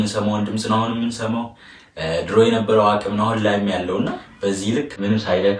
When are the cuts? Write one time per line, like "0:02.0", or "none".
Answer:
0:04.2